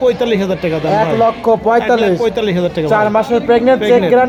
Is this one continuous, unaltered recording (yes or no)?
yes